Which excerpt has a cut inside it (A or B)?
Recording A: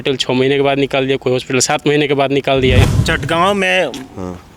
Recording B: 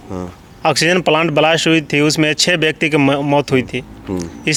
A